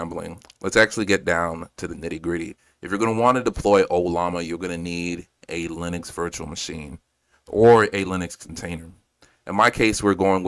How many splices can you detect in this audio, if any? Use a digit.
0